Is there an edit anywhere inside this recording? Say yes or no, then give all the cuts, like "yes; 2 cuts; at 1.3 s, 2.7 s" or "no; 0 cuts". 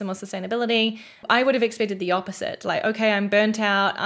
yes; 1 cut; at 1.2 s